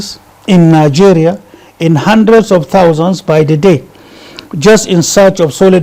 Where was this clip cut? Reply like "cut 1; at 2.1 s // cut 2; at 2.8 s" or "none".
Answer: none